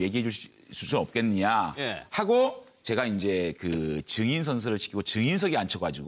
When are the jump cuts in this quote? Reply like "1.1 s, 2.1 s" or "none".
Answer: 4.0 s